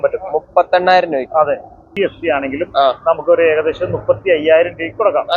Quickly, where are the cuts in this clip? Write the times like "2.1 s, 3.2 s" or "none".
1.9 s